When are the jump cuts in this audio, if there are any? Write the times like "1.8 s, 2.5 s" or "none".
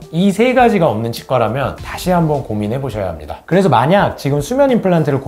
1.8 s, 3.3 s